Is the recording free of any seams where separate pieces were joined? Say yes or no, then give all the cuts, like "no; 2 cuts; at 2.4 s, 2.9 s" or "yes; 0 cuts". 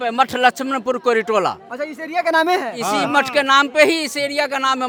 yes; 0 cuts